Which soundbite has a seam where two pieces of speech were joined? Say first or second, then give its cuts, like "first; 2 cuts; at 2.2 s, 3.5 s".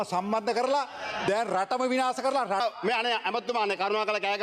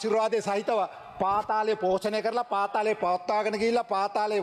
first; 1 cut; at 2.6 s